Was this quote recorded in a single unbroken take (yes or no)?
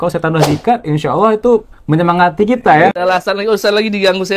no